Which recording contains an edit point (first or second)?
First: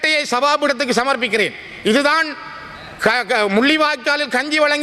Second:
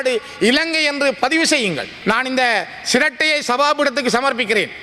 second